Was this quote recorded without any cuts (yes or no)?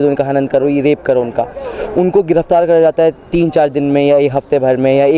yes